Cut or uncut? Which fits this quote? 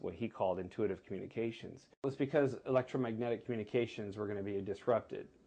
cut